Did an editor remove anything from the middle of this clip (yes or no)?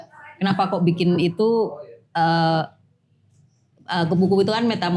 no